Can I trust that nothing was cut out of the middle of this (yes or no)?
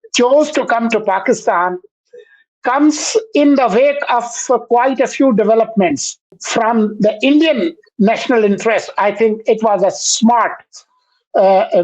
no